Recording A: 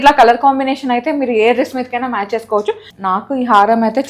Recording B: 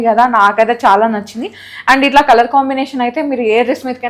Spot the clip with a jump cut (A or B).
A